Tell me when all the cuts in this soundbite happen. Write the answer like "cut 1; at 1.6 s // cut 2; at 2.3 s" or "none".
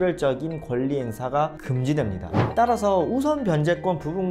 cut 1; at 2.2 s